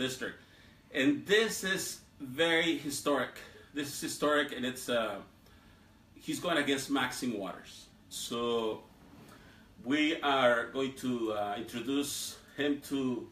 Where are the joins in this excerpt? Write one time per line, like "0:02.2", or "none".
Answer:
0:03.1